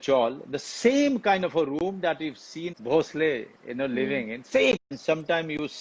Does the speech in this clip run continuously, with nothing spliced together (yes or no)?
no